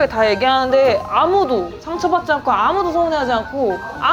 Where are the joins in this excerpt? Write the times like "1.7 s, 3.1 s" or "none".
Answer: none